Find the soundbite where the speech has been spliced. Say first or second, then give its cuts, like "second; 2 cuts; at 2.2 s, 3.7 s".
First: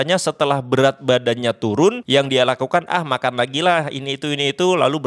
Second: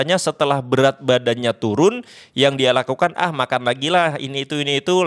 first; 1 cut; at 2.0 s